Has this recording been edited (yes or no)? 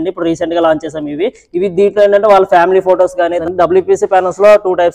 yes